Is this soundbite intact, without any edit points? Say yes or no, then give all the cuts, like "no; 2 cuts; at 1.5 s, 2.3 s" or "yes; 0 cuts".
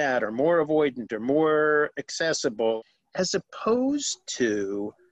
no; 1 cut; at 2.8 s